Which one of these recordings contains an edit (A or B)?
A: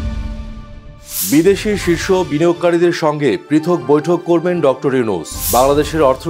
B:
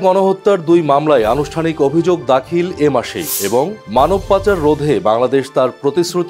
A